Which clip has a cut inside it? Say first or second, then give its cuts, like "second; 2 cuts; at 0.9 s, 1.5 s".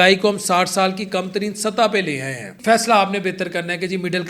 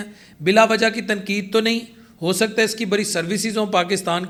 first; 1 cut; at 2.6 s